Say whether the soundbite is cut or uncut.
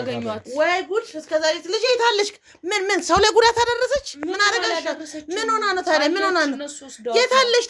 uncut